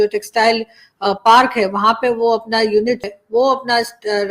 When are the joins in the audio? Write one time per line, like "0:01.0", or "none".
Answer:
0:03.1

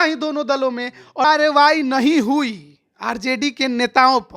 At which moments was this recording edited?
0:01.2

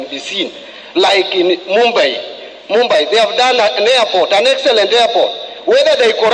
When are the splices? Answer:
none

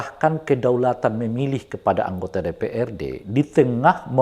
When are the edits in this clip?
none

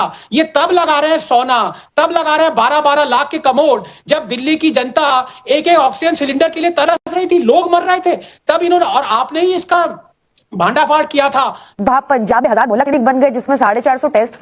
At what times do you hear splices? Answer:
0:11.7

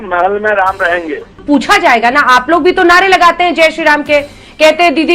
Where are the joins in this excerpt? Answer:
0:01.3

